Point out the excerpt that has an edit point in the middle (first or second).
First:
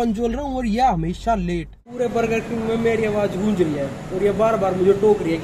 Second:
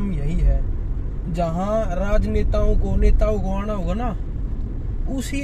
first